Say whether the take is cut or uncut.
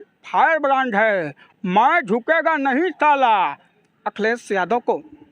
cut